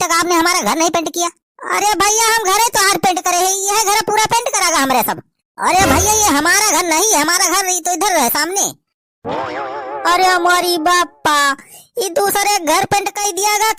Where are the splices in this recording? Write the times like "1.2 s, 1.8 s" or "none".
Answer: none